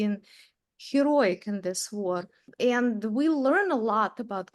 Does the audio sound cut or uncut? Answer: cut